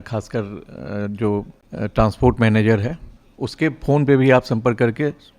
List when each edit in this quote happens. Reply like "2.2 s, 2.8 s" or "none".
1.6 s